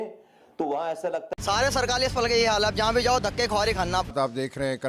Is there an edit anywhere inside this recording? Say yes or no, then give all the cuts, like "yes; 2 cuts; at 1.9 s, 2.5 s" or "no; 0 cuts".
yes; 2 cuts; at 1.3 s, 4.1 s